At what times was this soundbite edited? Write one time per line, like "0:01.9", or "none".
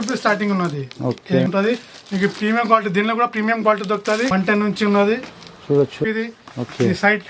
0:01.5
0:04.3
0:06.0